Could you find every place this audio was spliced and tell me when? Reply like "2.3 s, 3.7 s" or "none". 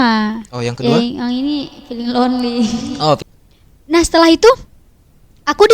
3.2 s